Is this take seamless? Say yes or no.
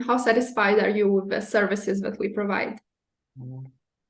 yes